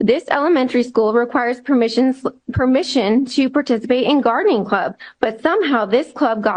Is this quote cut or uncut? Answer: cut